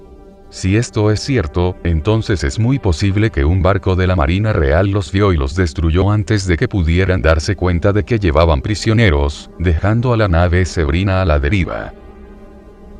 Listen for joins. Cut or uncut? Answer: uncut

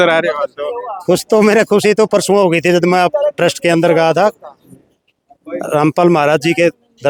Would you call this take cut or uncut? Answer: uncut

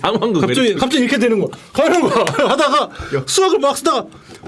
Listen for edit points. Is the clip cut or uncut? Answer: uncut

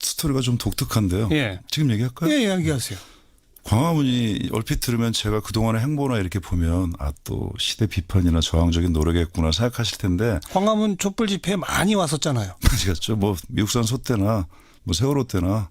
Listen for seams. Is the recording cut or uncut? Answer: uncut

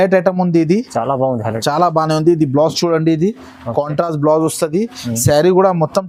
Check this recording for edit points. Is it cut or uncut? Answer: uncut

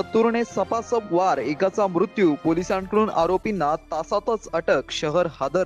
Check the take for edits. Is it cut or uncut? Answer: uncut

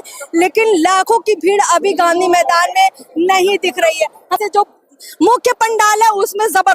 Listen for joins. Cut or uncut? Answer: cut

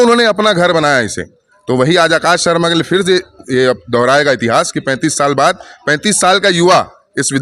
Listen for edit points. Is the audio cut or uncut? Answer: uncut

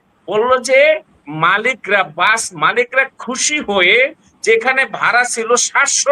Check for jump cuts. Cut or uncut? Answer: uncut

